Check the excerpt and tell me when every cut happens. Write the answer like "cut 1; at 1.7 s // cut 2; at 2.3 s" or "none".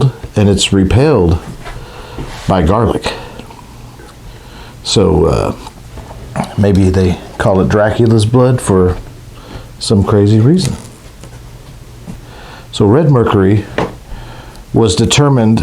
cut 1; at 12.1 s